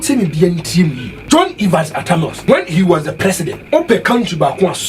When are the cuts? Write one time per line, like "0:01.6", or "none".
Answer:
0:01.1
0:02.4
0:03.5